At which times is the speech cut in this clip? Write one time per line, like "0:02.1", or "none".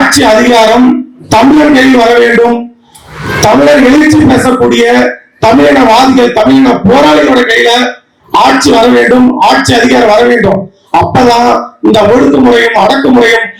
none